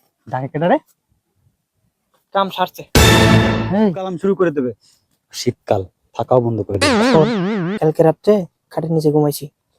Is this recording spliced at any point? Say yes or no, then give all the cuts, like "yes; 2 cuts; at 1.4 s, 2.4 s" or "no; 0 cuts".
yes; 1 cut; at 4.1 s